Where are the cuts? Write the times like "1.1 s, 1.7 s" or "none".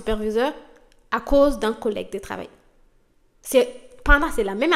none